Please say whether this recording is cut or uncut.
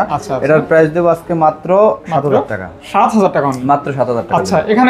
uncut